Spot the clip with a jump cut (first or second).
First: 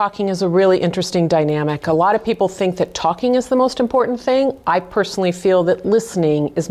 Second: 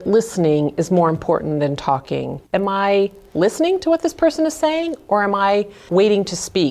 second